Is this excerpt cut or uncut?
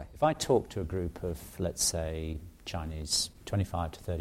uncut